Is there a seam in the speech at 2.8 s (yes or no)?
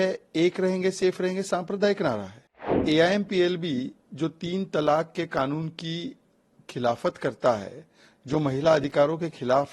yes